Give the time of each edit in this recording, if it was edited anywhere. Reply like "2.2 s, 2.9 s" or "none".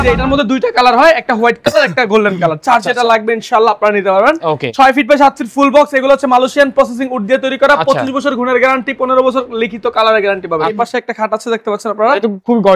4.7 s, 10.7 s